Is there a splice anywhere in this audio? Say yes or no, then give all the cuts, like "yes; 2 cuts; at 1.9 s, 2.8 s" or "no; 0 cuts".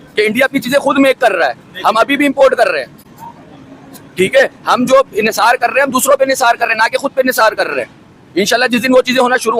no; 0 cuts